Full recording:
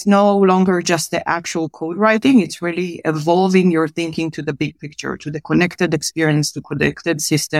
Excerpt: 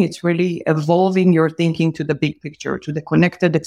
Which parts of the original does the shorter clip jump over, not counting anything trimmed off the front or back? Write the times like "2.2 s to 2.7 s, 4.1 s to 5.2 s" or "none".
none